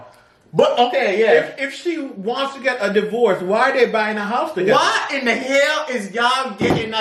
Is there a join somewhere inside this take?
no; 0 cuts

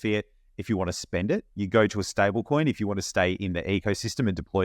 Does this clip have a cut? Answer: yes; 1 cut; at 1.5 s

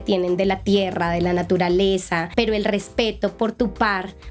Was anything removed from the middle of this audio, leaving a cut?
yes; 1 cut; at 2.3 s

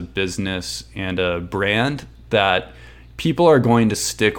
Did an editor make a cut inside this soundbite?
no; 0 cuts

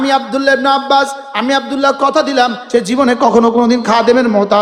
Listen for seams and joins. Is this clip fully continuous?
no; 1 cut; at 2.6 s

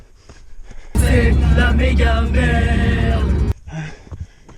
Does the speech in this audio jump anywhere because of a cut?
yes; 1 cut; at 3.6 s

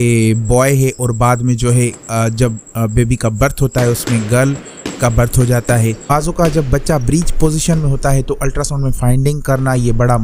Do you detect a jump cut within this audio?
yes; 1 cut; at 6.0 s

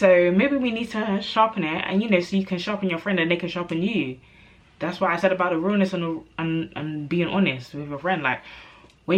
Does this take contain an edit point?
no; 0 cuts

